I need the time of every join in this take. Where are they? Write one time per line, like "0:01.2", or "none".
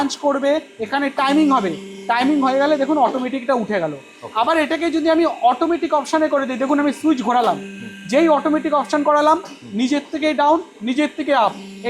none